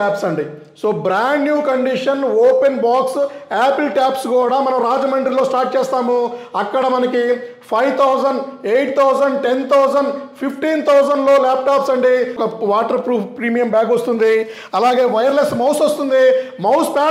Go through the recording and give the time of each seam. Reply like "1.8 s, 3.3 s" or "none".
12.4 s